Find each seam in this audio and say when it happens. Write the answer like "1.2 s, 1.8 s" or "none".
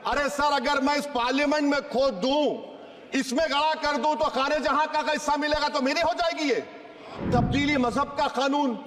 7.1 s